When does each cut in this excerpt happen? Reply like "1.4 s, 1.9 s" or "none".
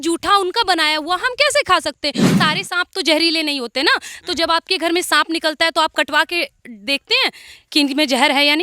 2.3 s